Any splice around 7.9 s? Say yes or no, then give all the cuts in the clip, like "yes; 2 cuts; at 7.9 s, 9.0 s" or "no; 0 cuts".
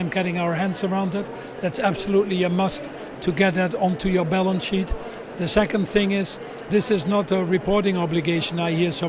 no; 2 cuts; at 5.1 s, 6.7 s